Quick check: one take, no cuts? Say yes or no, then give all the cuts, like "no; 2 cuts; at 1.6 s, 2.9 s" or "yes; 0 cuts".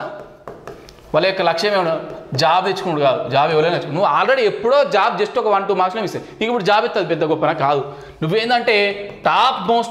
yes; 0 cuts